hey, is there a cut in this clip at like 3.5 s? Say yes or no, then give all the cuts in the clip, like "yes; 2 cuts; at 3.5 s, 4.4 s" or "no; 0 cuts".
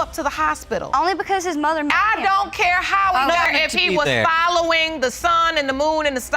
yes; 1 cut; at 3.5 s